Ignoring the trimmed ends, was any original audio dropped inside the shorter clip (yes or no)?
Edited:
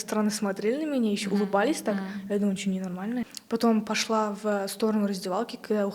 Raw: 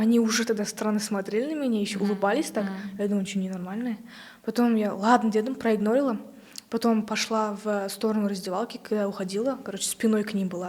yes